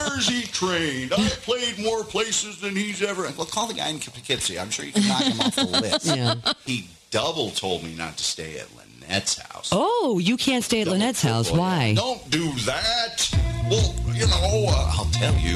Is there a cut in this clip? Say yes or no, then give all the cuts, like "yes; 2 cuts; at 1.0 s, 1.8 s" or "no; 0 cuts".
yes; 1 cut; at 6.6 s